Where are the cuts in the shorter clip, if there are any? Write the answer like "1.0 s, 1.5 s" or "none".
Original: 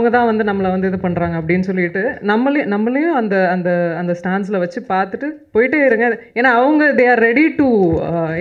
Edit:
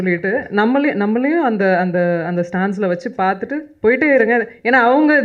none